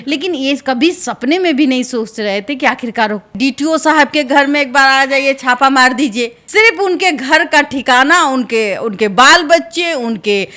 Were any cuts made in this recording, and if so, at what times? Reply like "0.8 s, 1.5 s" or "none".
3.3 s, 6.4 s